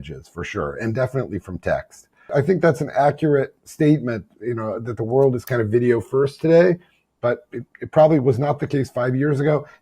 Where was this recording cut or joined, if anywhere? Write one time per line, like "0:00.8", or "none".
0:02.3

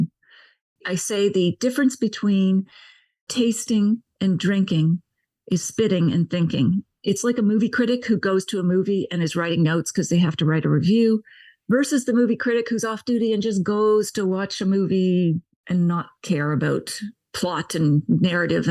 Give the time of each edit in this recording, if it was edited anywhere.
none

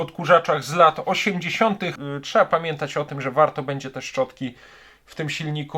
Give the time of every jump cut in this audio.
0:02.0

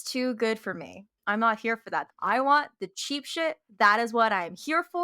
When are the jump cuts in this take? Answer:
0:01.1
0:02.1
0:03.7

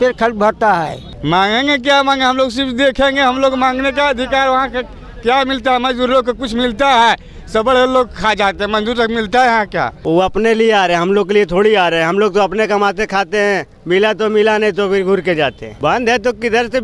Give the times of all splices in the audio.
0:01.1
0:10.0
0:15.7

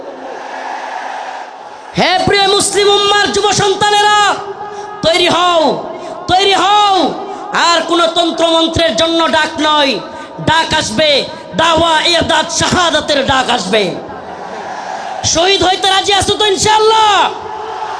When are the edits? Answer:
0:01.5

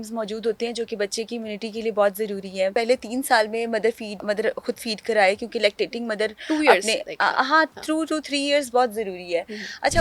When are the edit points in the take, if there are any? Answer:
0:02.7
0:04.2

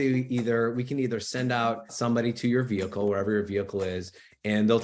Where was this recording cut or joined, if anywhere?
0:01.4

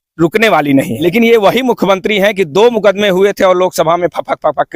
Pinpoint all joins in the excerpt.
0:01.0

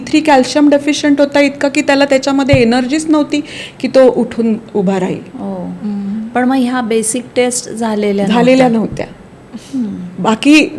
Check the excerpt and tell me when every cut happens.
none

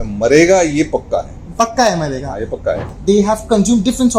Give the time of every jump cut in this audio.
0:02.9

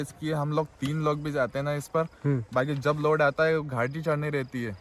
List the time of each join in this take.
none

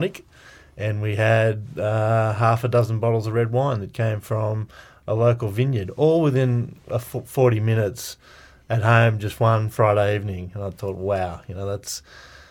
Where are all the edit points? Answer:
none

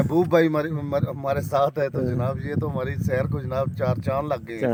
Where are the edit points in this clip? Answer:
none

